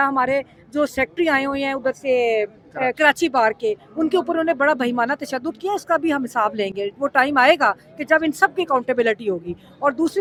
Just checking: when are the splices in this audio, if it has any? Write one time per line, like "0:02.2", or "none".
none